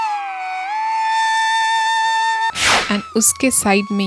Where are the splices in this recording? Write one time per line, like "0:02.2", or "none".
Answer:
0:02.5